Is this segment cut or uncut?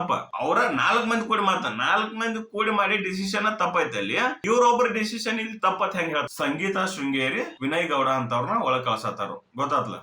cut